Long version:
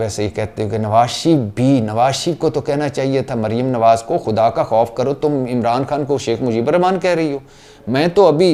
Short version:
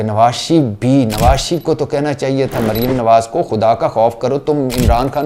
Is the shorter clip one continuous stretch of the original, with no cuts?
yes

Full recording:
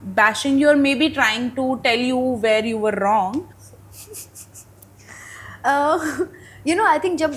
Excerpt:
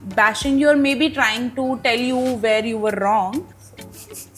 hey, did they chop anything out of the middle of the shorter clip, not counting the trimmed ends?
no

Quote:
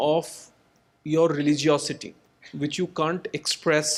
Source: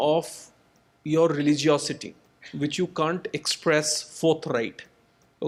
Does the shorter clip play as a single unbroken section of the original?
yes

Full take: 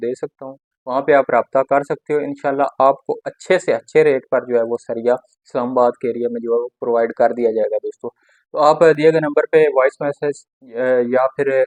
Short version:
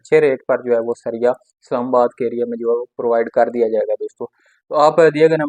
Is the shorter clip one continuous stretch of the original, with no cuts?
yes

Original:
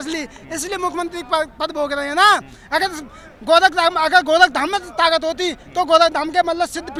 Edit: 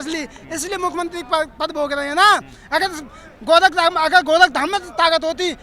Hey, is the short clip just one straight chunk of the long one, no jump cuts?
yes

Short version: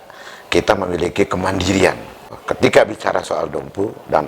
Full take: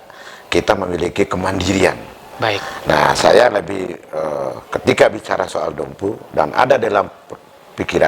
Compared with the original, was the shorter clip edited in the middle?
yes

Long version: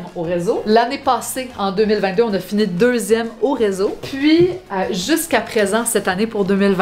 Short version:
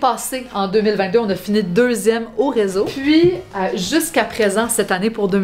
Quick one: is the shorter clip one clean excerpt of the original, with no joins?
no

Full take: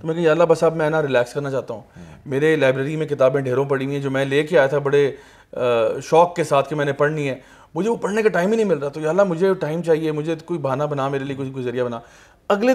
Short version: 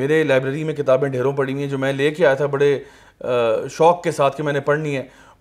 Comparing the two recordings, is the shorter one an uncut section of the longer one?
yes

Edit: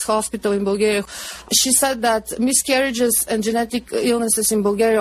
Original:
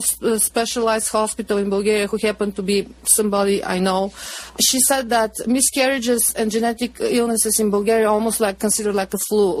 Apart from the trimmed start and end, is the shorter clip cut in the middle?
yes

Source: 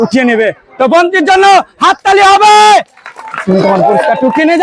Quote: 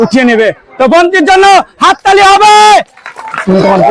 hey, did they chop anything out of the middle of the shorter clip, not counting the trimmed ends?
no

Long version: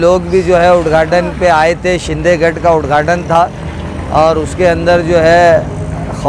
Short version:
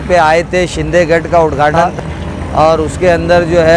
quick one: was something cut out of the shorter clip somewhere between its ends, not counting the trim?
yes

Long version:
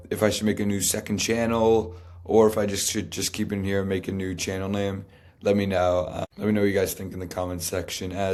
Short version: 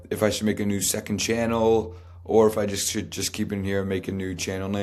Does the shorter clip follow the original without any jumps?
yes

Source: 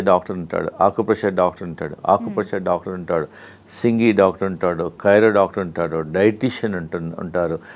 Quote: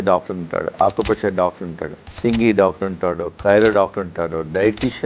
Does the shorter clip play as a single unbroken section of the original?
no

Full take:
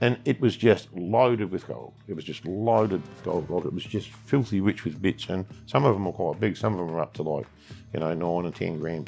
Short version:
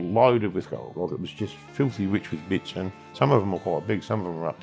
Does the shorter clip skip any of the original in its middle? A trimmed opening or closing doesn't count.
yes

